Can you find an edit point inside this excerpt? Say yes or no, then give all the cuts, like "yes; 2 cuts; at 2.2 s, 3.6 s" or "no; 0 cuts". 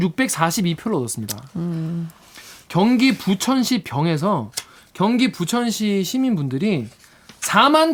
no; 0 cuts